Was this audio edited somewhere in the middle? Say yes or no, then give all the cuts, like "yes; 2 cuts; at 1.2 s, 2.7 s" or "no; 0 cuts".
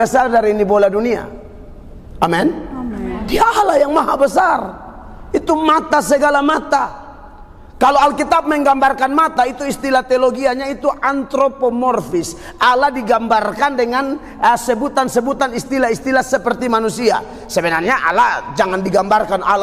no; 0 cuts